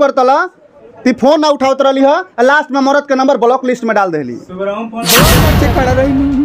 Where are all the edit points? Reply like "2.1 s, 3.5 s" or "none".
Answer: 5.4 s